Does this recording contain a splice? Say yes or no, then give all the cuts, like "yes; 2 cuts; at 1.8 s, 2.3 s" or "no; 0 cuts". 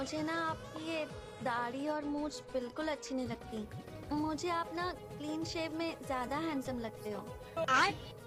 no; 0 cuts